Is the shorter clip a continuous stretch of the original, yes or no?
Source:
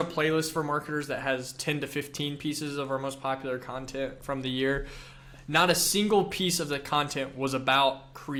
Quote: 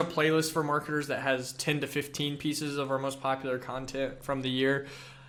yes